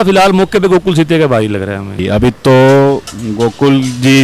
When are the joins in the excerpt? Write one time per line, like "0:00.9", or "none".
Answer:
0:02.0